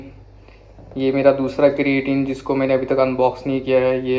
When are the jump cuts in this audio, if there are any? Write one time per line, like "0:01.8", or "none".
none